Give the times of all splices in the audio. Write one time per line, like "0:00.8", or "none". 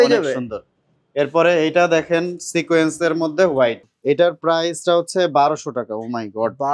0:03.9